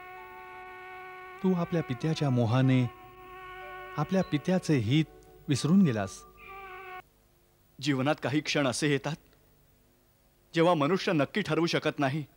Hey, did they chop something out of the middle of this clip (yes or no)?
yes